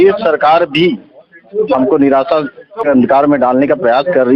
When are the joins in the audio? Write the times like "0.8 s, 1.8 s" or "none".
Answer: 2.9 s